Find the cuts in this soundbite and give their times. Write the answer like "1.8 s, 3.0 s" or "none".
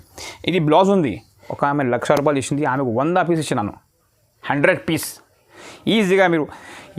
1.5 s